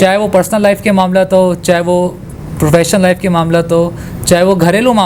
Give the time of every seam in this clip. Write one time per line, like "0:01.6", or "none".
none